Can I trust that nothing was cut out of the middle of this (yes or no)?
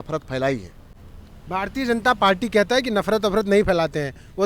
yes